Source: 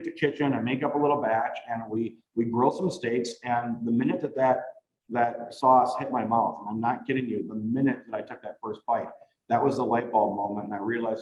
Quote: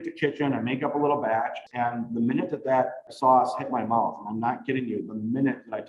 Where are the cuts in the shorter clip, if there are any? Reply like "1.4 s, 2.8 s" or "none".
1.6 s, 3.1 s